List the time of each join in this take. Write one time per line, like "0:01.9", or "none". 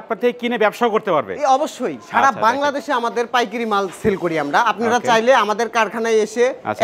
none